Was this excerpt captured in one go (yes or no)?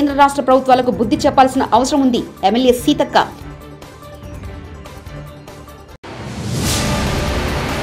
yes